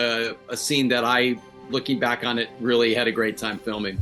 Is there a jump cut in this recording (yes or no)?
no